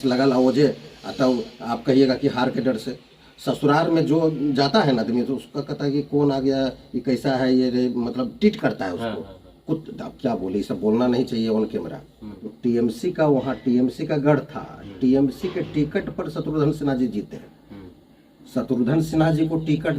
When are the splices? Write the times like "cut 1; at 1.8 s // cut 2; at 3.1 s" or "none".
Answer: cut 1; at 12.5 s